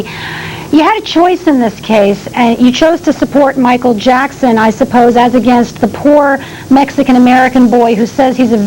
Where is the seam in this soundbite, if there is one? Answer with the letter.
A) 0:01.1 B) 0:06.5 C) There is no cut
C